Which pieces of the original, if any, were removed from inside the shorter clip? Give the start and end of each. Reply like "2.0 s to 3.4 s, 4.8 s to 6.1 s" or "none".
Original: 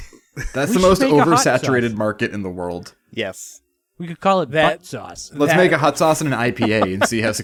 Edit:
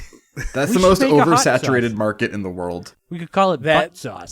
3.0 s to 3.8 s

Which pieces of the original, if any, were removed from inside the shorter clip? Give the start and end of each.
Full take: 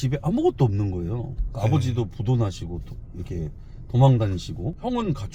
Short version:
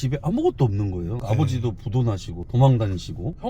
1.2 s to 1.5 s, 2.7 s to 3.8 s

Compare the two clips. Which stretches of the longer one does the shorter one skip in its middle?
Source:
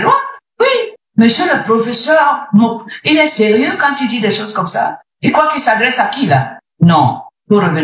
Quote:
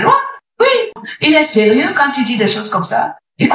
1.0 s to 2.8 s

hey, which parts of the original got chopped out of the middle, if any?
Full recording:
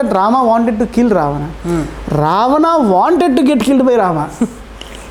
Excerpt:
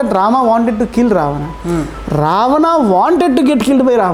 none

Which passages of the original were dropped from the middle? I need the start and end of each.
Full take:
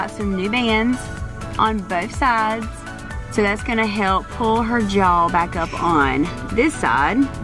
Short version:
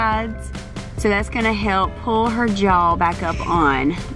none

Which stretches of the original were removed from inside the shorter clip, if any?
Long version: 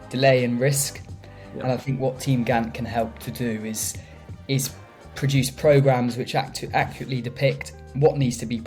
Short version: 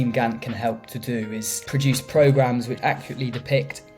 3.9 s to 5.1 s, 6.3 s to 6.7 s

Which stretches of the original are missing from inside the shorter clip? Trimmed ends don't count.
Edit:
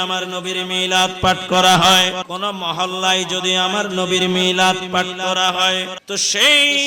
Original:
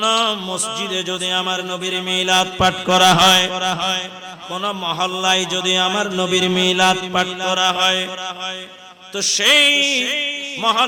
3.6 s to 4.4 s, 8.2 s to 9.0 s

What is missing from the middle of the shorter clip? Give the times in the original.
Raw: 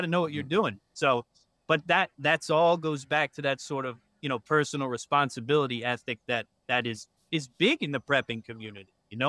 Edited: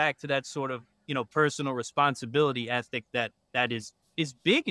none

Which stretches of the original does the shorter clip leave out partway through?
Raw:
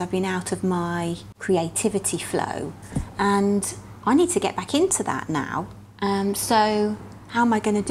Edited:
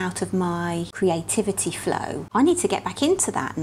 1.2 s to 1.3 s, 2.6 s to 3.9 s

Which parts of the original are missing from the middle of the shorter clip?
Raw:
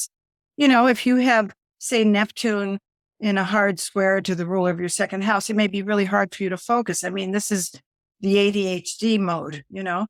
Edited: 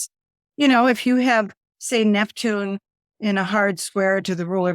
none

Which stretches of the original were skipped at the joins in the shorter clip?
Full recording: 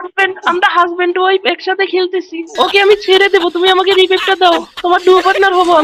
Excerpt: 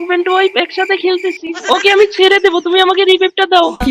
none

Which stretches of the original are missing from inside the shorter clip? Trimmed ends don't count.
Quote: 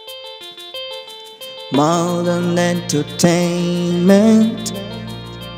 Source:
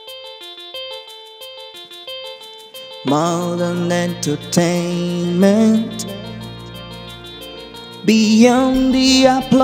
1.0 s to 2.3 s

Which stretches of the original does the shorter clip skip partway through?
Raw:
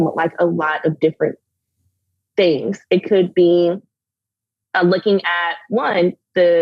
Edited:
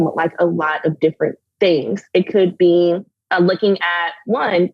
1.4 s to 2.2 s, 3.9 s to 4.6 s

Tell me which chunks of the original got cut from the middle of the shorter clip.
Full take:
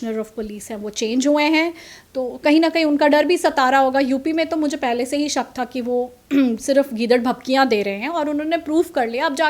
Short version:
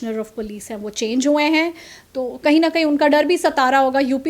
none

